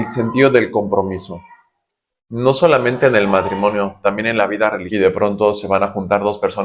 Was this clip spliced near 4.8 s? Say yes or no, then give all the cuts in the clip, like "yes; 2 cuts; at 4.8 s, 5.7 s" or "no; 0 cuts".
yes; 1 cut; at 4.8 s